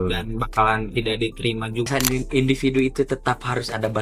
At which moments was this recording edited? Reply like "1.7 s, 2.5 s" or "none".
1.9 s